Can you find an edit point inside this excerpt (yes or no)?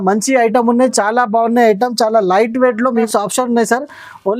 yes